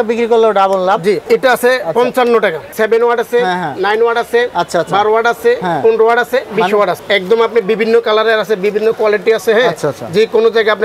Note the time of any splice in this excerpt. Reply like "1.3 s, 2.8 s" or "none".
1.2 s, 2.7 s, 7.0 s